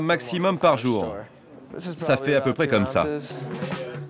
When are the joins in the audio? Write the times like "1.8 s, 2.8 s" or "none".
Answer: none

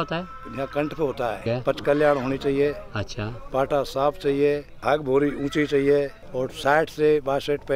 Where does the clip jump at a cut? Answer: 1.4 s, 4.7 s, 6.2 s

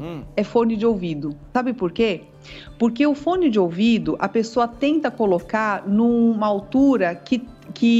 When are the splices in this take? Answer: 1.5 s

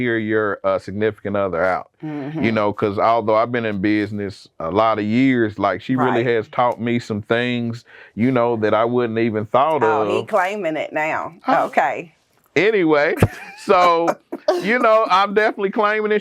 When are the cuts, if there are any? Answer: none

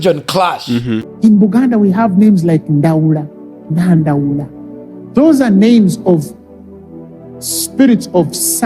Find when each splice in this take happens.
1.1 s

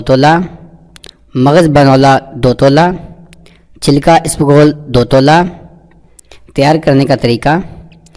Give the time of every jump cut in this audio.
6.6 s

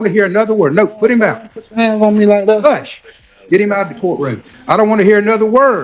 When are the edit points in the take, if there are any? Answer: 4.5 s

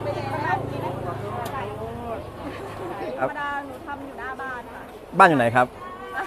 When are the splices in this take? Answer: 3.2 s

